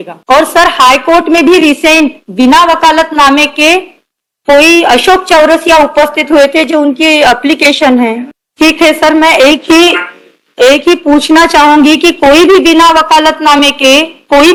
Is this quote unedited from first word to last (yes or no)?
yes